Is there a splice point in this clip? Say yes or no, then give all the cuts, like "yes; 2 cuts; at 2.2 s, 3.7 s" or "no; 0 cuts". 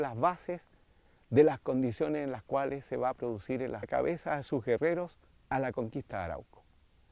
no; 0 cuts